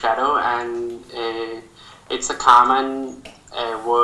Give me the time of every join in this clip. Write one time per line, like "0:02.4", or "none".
none